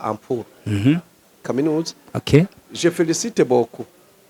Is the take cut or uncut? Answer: cut